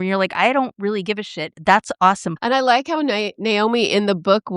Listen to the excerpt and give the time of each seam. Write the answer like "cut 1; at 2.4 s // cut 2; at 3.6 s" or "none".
cut 1; at 2.3 s

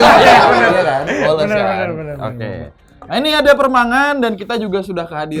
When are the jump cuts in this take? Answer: none

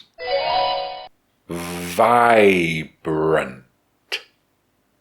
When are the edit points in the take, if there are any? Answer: cut 1; at 1.0 s

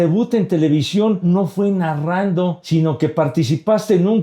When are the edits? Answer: cut 1; at 1.2 s // cut 2; at 2.6 s

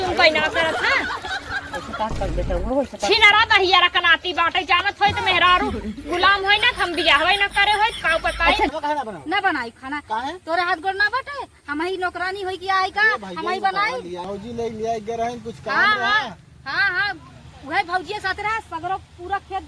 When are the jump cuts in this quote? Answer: cut 1; at 8.7 s // cut 2; at 14.2 s

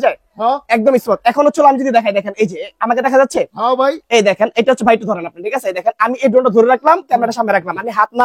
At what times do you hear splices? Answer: none

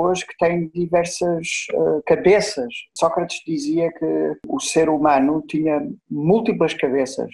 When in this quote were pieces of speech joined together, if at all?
cut 1; at 4.5 s

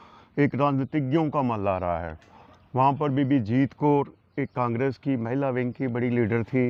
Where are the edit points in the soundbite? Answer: none

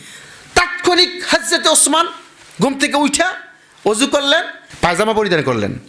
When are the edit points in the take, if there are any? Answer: none

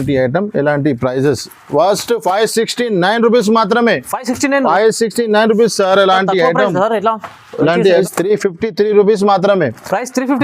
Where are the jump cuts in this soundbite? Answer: cut 1; at 8.0 s

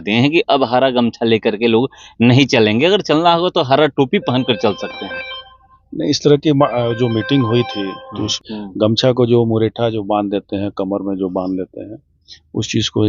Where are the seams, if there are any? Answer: cut 1; at 8.3 s

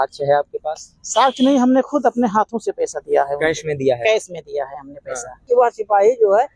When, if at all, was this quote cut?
cut 1; at 5.5 s

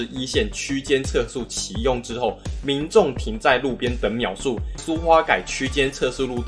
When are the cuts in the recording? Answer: cut 1; at 4.8 s

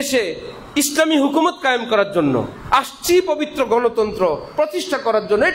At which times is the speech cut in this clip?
none

